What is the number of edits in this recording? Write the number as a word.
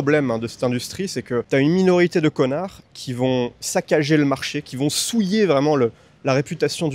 one